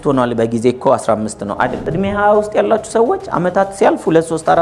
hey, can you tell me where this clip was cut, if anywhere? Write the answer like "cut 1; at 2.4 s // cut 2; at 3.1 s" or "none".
cut 1; at 1.8 s